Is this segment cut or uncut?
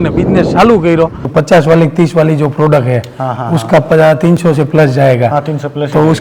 cut